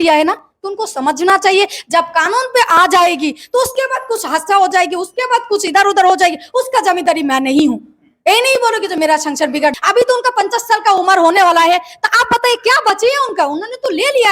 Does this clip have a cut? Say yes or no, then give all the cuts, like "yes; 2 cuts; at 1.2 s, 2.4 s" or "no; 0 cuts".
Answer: yes; 1 cut; at 9.7 s